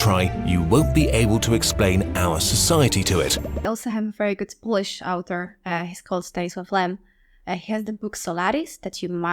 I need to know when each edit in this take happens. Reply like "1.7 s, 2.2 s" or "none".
3.5 s